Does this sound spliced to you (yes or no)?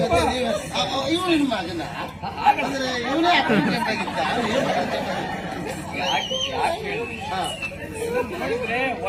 no